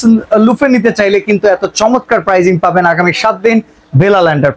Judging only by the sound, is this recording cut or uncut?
uncut